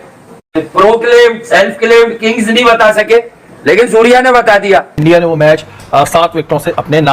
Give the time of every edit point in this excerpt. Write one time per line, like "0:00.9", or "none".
0:04.9